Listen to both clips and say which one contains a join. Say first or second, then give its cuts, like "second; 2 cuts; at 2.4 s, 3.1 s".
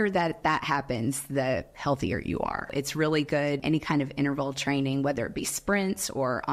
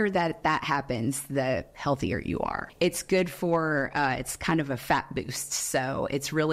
first; 2 cuts; at 2.7 s, 3.6 s